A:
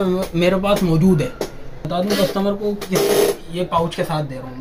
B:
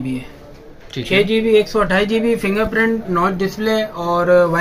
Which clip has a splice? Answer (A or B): A